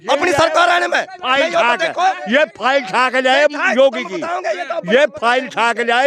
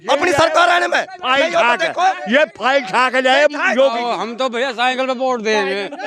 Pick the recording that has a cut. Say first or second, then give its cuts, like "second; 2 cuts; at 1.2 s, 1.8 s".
second; 1 cut; at 4.1 s